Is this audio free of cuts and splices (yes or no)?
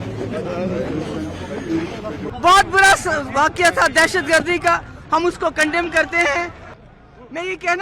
no